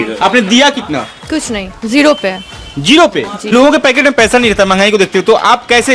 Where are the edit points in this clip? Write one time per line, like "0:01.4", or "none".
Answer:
0:03.5